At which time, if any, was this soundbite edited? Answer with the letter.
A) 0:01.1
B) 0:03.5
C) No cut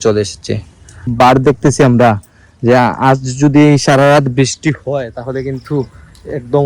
A